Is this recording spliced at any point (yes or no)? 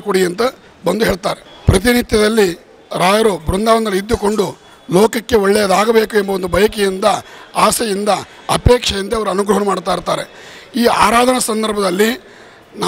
yes